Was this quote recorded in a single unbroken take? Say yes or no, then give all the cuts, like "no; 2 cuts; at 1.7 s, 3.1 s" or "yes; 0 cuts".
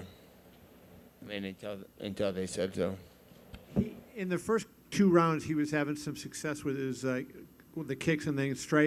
yes; 0 cuts